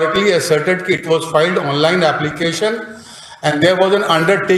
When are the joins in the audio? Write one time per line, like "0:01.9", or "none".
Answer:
none